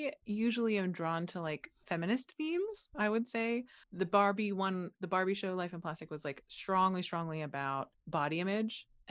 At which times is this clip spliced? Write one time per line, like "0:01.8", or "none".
0:01.8
0:03.8